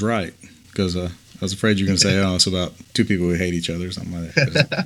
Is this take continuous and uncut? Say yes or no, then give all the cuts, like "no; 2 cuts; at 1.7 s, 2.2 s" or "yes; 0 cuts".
no; 1 cut; at 2.8 s